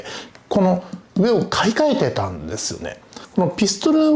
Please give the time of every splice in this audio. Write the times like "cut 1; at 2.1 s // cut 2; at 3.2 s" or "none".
cut 1; at 3.2 s